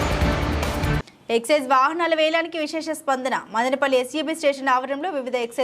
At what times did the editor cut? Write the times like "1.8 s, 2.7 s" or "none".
none